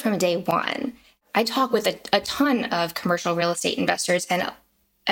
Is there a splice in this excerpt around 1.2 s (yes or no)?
yes